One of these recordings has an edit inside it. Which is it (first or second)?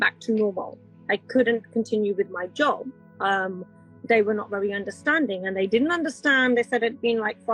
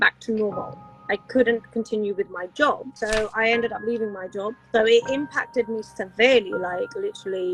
second